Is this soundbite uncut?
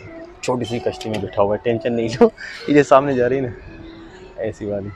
yes; 0 cuts

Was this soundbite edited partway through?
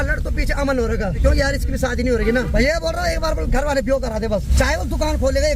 yes; 3 cuts; at 1.2 s, 2.5 s, 4.5 s

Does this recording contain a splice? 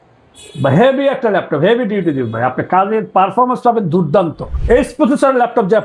yes; 1 cut; at 4.5 s

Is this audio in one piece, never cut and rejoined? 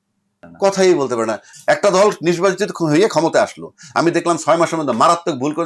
no; 1 cut; at 1.5 s

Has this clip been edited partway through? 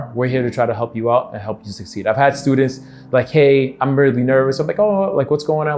no; 0 cuts

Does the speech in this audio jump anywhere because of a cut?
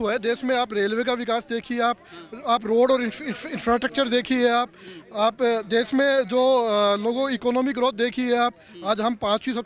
no; 0 cuts

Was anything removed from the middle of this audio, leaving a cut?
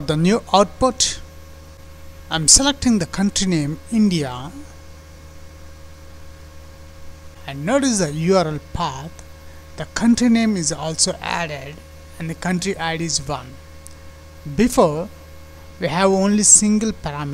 yes; 1 cut; at 7.4 s

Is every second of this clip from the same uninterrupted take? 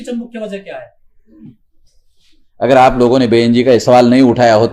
yes; 0 cuts

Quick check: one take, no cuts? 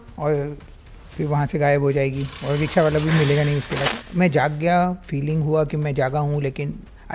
no; 1 cut; at 3.7 s

